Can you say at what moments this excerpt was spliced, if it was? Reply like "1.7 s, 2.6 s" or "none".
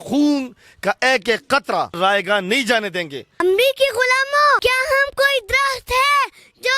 2.0 s, 3.4 s, 4.6 s